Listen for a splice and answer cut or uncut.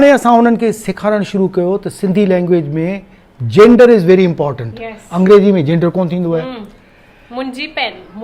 uncut